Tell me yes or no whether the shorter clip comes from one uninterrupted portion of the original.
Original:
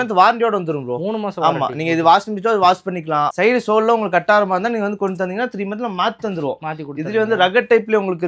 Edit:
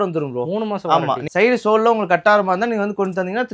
no